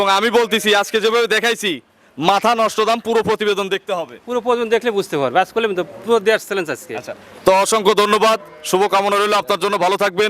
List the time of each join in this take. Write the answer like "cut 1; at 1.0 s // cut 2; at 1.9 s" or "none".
none